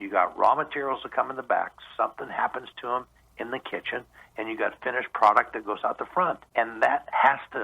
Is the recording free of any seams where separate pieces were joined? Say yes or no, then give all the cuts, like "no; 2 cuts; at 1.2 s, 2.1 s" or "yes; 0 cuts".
no; 1 cut; at 6.4 s